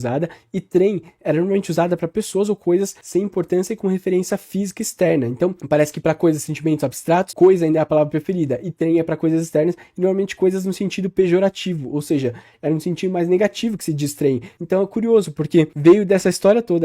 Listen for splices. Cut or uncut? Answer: cut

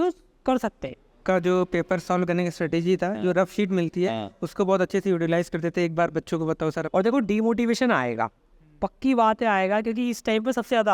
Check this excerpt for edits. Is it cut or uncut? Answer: cut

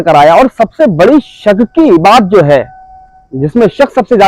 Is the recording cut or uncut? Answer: uncut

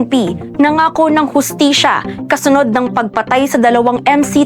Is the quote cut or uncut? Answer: uncut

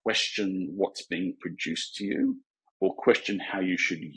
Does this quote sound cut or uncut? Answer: uncut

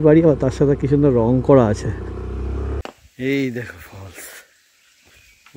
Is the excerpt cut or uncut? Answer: cut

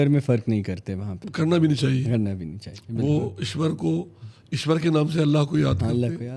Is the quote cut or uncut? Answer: uncut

